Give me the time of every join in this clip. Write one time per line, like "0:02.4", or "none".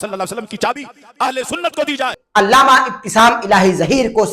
0:02.2